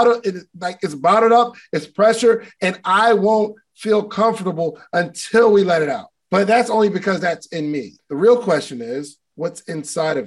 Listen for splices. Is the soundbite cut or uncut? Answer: cut